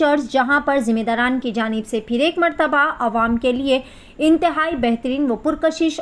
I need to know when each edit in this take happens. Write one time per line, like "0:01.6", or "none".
none